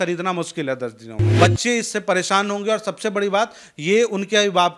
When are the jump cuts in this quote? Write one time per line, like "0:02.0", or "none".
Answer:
0:01.2